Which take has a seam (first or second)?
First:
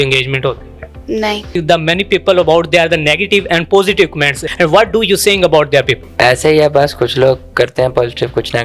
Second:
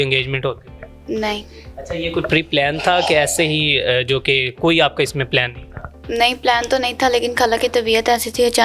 first